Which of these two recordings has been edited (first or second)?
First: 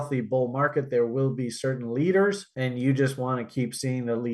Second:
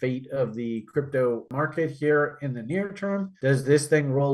second